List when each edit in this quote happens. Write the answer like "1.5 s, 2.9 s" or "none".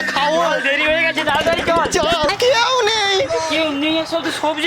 2.3 s